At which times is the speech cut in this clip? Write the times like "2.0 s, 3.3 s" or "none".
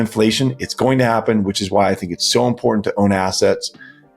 none